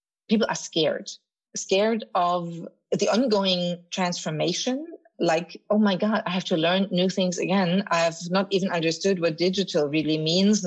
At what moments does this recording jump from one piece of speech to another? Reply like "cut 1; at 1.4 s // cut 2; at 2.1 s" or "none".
cut 1; at 1.4 s // cut 2; at 2.9 s